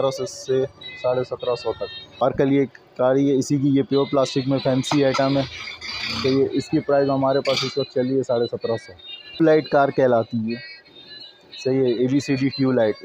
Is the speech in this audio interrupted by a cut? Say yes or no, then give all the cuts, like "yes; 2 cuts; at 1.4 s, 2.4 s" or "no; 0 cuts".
yes; 2 cuts; at 2.2 s, 9.4 s